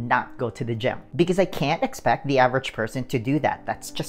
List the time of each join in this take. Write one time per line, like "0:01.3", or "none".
0:01.0

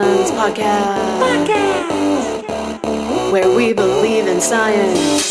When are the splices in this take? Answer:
none

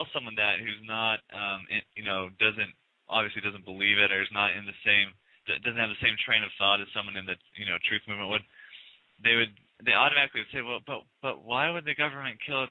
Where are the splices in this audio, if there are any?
none

